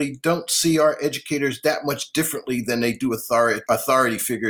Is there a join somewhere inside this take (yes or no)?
yes